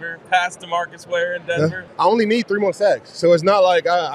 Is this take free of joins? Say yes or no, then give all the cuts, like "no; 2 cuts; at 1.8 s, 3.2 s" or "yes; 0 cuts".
no; 1 cut; at 1.8 s